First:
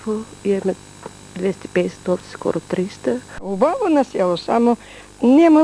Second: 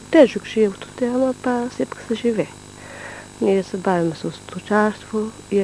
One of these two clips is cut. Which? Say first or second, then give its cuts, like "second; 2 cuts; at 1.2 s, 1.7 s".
first; 1 cut; at 3.5 s